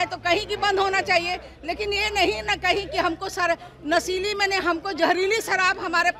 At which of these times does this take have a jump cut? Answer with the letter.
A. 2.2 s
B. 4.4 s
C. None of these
C